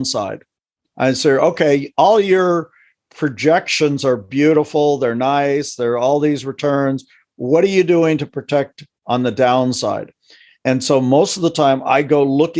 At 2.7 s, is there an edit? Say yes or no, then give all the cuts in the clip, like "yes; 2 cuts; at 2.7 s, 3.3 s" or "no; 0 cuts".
no; 0 cuts